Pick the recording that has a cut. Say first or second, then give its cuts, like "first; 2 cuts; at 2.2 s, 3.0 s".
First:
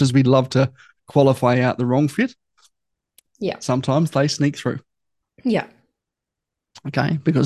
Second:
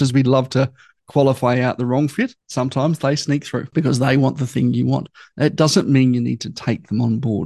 second; 2 cuts; at 2.5 s, 3.7 s